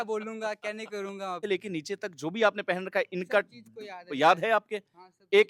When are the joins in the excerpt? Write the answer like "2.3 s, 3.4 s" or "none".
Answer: 1.4 s